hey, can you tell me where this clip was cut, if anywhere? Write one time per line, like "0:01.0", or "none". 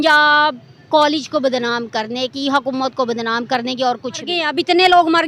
0:04.4